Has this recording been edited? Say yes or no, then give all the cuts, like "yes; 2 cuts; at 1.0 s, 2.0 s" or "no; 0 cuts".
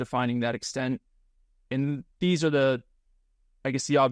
no; 0 cuts